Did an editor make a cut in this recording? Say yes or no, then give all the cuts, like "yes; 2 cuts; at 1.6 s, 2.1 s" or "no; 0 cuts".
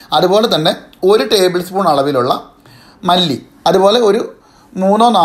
yes; 1 cut; at 3.5 s